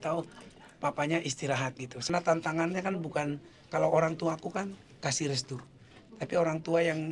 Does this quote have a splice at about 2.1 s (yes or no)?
yes